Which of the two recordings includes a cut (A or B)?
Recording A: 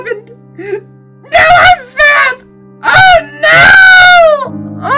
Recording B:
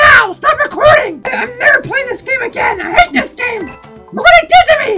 B